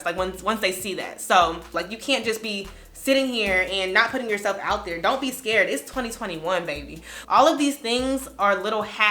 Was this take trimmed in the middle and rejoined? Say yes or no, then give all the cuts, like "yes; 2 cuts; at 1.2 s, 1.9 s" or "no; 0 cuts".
yes; 2 cuts; at 1.8 s, 7.1 s